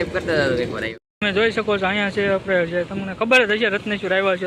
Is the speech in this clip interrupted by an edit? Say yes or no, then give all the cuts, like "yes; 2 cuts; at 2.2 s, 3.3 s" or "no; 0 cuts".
yes; 1 cut; at 0.9 s